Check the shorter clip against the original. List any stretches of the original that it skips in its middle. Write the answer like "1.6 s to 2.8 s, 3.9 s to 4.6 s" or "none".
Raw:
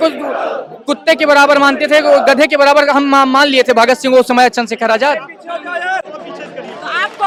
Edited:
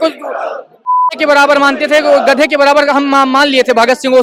none